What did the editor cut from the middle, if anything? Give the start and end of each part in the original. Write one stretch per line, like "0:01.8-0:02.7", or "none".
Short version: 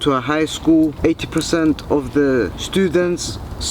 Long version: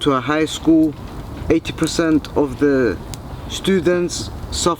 0:01.0-0:01.4
0:03.1-0:03.5